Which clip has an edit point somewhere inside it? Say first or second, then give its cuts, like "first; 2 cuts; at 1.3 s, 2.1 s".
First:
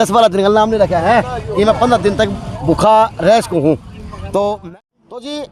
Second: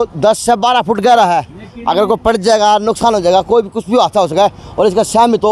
first; 1 cut; at 4.6 s